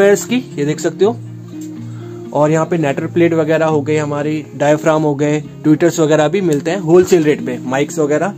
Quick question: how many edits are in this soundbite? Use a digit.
0